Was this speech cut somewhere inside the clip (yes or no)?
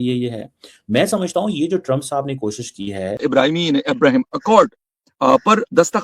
yes